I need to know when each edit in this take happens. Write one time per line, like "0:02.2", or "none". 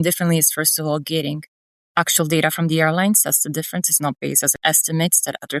0:04.6